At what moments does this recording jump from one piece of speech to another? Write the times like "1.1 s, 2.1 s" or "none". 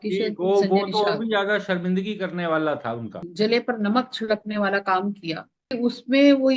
3.2 s, 5.7 s